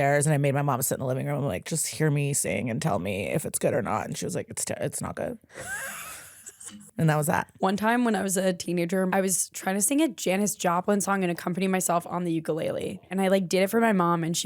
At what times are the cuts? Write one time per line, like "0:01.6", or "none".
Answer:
0:05.5
0:06.8
0:07.5
0:09.1
0:13.0